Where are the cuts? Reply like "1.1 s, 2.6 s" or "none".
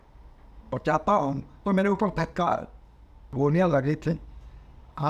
3.3 s